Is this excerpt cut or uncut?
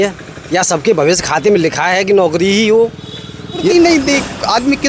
cut